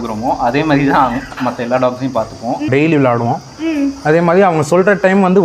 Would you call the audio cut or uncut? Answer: cut